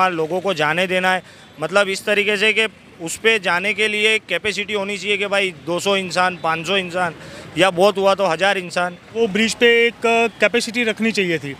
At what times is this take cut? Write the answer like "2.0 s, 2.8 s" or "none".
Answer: 9.1 s